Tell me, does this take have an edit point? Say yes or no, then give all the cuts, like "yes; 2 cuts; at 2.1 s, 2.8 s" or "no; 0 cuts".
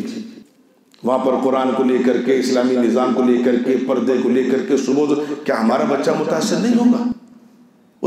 no; 0 cuts